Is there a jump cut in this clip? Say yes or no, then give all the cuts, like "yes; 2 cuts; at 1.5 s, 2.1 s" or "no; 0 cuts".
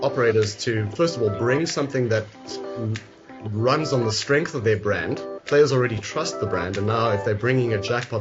no; 0 cuts